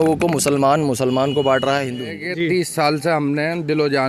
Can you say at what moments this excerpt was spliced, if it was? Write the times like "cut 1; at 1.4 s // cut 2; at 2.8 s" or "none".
cut 1; at 2.2 s